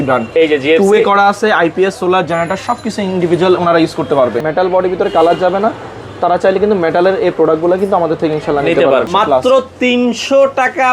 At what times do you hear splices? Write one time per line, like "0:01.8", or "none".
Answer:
0:04.4
0:09.1